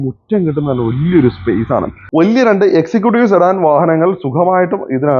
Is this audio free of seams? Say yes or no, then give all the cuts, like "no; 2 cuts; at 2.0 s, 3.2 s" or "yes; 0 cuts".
no; 1 cut; at 2.0 s